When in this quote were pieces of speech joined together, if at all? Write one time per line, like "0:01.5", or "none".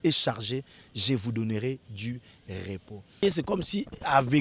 0:03.2